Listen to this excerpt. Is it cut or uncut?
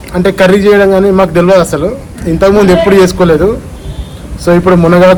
uncut